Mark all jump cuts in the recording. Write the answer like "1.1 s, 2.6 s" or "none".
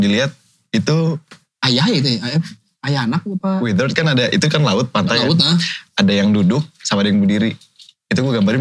none